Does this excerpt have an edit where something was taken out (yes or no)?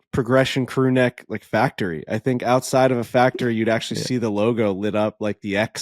no